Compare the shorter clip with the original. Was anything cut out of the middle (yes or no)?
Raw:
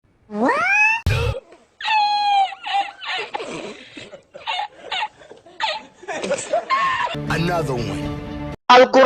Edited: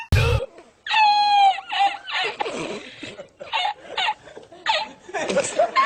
no